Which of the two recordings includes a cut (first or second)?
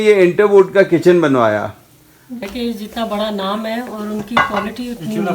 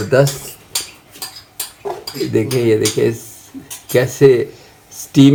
first